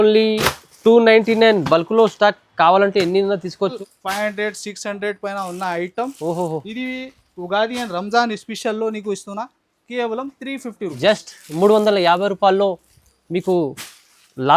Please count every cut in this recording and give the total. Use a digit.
1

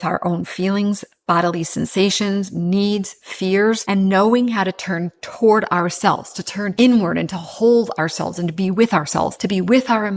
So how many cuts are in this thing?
3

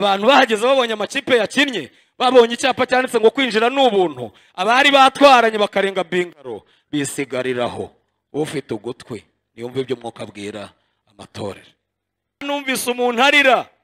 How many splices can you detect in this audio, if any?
1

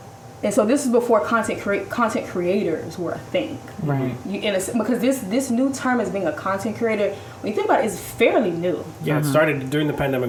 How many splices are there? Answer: 0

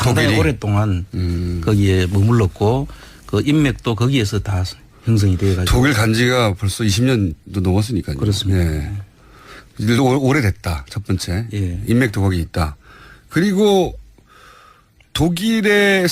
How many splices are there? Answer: 1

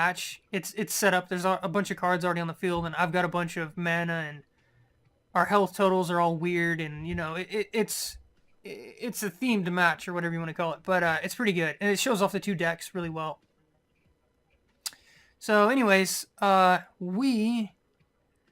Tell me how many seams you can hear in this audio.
1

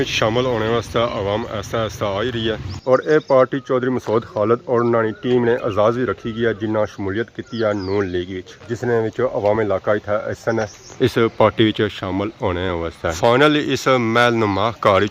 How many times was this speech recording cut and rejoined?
0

